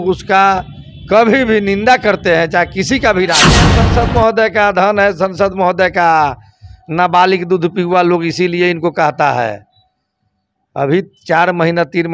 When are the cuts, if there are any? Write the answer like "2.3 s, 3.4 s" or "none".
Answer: 3.8 s